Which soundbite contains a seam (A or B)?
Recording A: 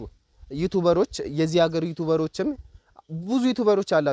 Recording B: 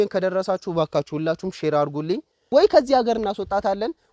B